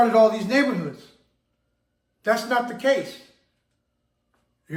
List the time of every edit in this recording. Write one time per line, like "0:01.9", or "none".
none